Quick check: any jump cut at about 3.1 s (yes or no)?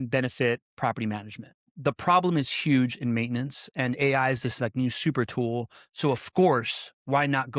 no